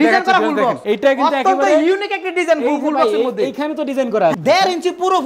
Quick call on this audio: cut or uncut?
cut